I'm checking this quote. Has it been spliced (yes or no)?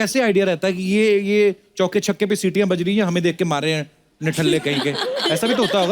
no